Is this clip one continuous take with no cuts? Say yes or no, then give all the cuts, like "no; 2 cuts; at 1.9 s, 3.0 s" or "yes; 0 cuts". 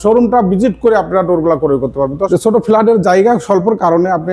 no; 1 cut; at 2.3 s